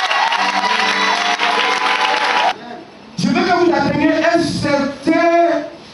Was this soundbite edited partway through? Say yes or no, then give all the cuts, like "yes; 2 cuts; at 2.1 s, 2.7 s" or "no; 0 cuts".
yes; 1 cut; at 2.5 s